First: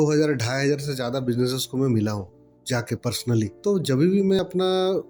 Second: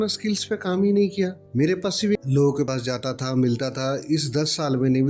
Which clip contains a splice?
second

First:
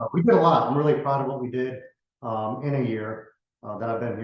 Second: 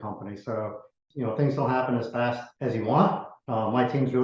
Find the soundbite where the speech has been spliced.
second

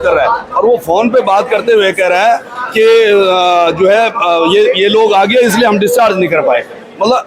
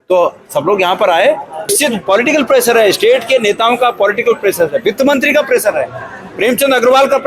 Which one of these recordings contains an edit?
second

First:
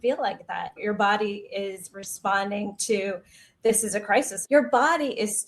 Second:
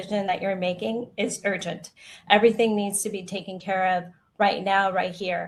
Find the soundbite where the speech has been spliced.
first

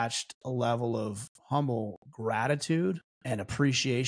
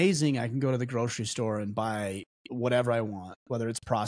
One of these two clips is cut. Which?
first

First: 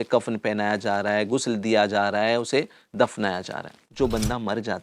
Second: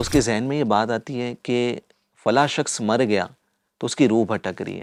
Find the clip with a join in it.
first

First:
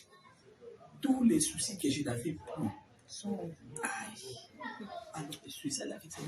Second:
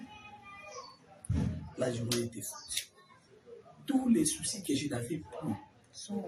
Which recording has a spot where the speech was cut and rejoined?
first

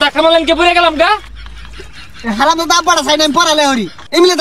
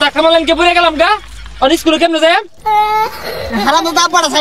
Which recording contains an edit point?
first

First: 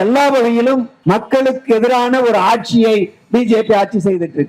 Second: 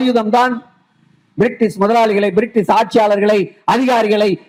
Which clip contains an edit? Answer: first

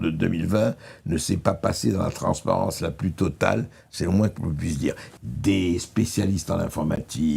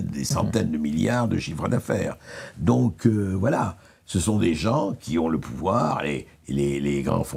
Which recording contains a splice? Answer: first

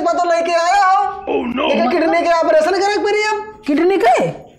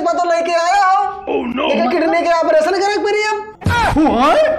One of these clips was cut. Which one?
second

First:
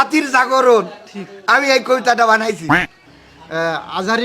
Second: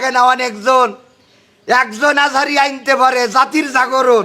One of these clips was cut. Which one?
first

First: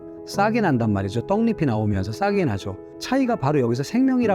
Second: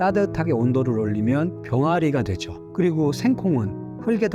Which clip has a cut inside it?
first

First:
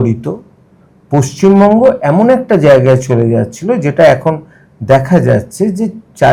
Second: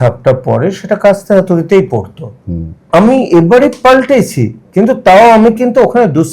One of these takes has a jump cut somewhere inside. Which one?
second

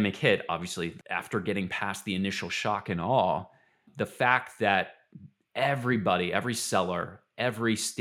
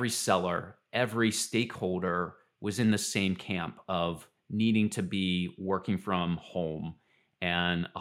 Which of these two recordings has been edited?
first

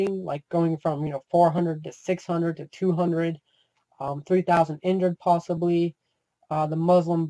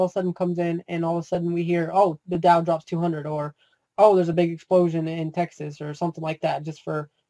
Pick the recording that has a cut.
second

